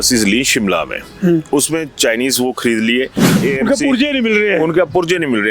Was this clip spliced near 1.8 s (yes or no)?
no